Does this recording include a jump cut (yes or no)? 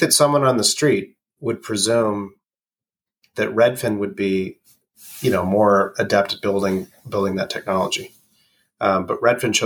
no